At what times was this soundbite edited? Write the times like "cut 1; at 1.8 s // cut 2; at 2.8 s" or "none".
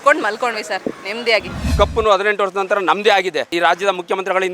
cut 1; at 1.7 s // cut 2; at 3.5 s